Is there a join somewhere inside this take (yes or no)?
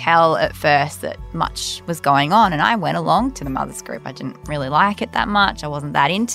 no